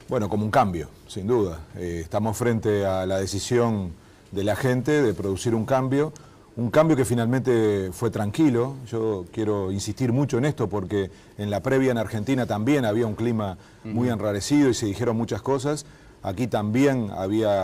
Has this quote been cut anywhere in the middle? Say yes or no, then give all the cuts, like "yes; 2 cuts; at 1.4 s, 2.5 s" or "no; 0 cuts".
yes; 1 cut; at 14.4 s